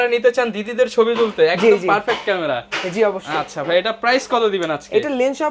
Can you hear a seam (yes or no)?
no